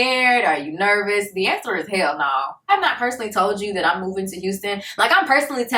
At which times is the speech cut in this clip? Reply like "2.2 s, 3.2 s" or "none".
2.7 s